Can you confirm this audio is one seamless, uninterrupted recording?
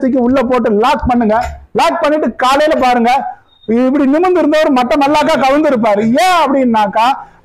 yes; 0 cuts

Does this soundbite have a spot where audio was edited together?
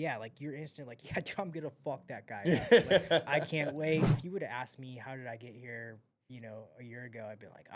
yes; 1 cut; at 4.2 s

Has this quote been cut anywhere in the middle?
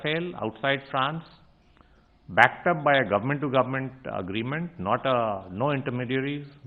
no; 0 cuts

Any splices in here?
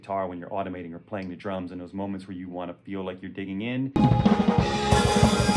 no; 0 cuts

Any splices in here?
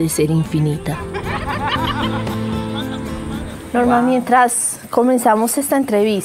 no; 0 cuts

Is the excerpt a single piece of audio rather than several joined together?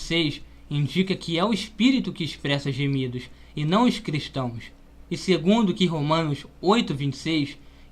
yes; 0 cuts

